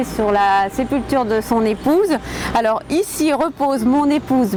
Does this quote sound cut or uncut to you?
uncut